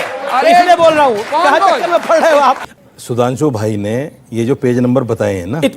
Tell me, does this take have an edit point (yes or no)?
yes